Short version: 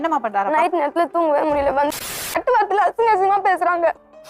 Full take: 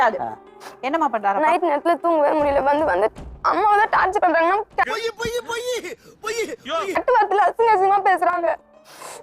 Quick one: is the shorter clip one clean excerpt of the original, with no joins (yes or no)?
no